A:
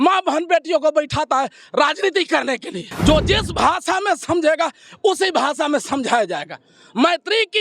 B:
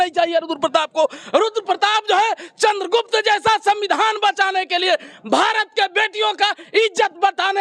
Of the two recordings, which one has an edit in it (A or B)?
A